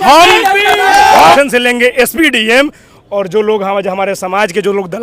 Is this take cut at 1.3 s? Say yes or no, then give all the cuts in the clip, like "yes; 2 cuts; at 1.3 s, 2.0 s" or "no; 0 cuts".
yes; 1 cut; at 1.3 s